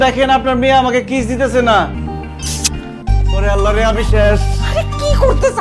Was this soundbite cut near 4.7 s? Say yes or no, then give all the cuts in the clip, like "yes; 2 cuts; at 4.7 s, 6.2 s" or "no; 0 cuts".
no; 1 cut; at 2.0 s